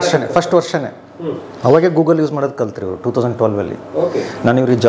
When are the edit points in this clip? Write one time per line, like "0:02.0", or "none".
none